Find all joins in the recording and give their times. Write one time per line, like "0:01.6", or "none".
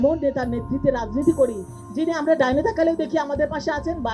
none